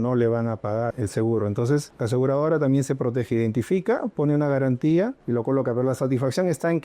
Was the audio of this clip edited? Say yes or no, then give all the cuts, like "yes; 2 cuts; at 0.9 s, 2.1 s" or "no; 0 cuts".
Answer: yes; 3 cuts; at 0.9 s, 1.9 s, 5.2 s